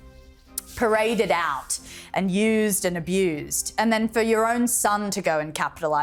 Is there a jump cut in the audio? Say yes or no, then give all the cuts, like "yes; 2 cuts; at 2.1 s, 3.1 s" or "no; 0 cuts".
no; 0 cuts